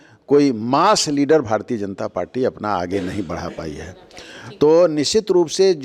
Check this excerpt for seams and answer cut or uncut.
uncut